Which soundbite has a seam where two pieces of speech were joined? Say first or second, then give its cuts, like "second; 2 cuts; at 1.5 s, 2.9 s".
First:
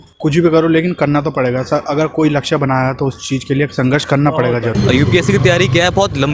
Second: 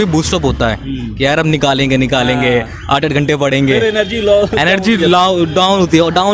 first; 1 cut; at 4.7 s